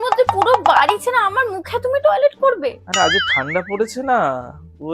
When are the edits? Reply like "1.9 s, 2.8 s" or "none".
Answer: none